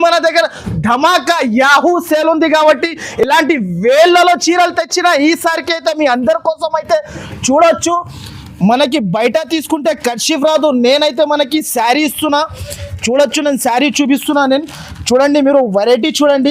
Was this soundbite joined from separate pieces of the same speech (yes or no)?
no